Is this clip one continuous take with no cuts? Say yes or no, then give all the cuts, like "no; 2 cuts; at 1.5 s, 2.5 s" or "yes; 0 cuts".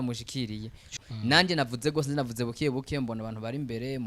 no; 1 cut; at 0.9 s